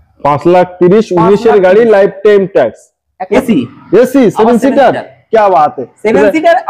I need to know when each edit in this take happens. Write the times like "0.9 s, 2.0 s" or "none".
3.2 s